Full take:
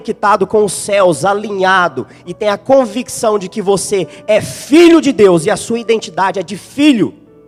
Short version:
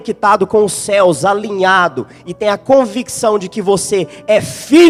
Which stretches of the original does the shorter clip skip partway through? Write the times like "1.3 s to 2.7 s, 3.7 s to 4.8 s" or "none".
none